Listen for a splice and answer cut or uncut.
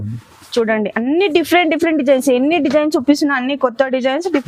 uncut